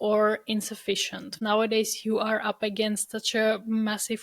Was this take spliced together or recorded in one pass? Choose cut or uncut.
cut